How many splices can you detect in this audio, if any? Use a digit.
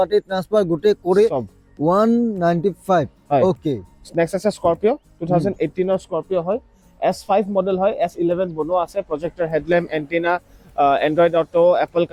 0